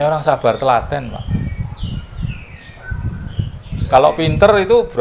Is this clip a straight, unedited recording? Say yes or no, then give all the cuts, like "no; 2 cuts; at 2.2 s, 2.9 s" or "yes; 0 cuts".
yes; 0 cuts